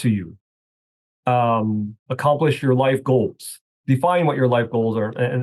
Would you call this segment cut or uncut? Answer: uncut